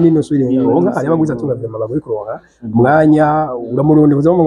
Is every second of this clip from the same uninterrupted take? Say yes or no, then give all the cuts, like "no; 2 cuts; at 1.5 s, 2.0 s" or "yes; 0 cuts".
no; 1 cut; at 0.9 s